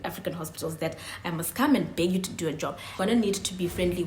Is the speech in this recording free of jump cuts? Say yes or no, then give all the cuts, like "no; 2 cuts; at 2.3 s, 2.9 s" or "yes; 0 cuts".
no; 1 cut; at 3.0 s